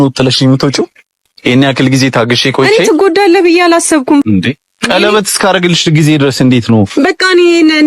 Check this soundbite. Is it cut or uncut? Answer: cut